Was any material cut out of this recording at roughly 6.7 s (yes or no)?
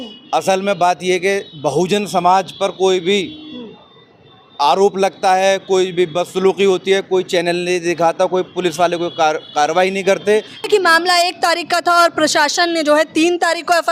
no